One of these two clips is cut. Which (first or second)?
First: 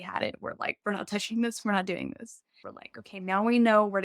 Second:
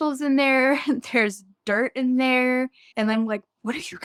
first